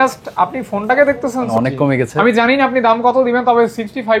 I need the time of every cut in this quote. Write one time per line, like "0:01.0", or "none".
0:01.5

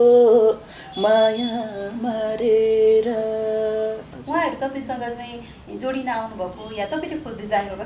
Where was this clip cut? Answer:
0:04.1

